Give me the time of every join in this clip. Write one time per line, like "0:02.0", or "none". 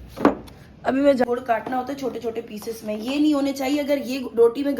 0:01.2